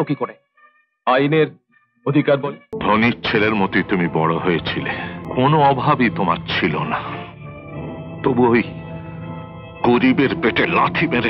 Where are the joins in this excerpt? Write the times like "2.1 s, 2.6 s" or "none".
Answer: 2.7 s, 5.2 s